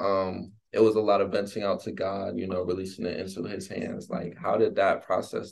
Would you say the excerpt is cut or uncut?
uncut